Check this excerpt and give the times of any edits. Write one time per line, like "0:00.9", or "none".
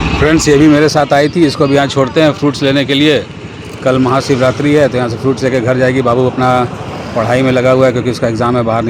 none

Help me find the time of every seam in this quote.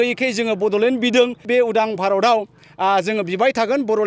0:01.4

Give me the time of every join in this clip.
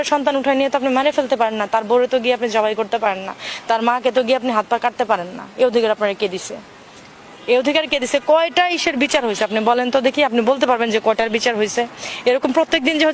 none

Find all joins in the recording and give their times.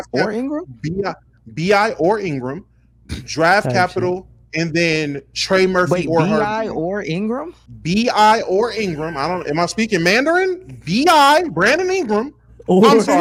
none

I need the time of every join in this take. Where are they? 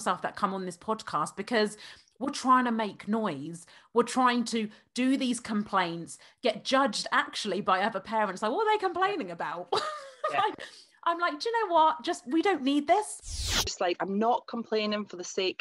0:13.6

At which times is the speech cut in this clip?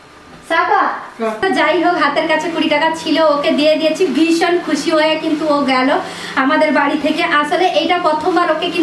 0:01.4

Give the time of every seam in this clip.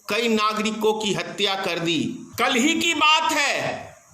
0:02.2

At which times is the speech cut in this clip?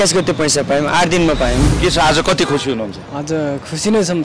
0:01.7

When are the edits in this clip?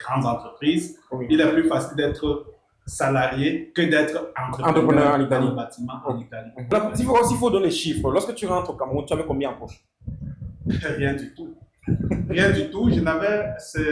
0:06.7

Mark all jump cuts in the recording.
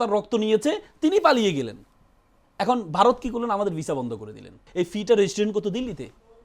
0:04.6

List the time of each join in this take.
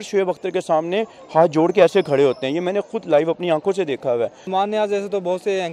0:04.5

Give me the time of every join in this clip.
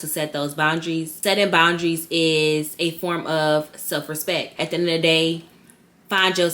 0:01.1
0:04.5

